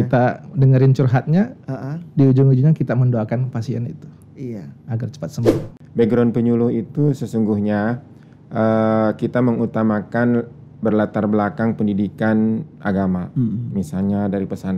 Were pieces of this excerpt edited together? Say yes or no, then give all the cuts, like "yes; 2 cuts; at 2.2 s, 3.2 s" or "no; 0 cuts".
yes; 1 cut; at 5.6 s